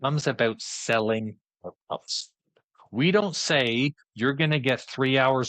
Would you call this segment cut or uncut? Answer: uncut